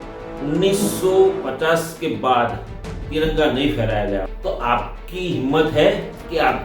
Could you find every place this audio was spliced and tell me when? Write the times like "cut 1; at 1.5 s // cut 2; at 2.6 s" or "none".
cut 1; at 4.3 s